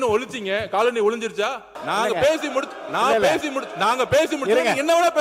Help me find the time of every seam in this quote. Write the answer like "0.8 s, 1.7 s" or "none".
1.7 s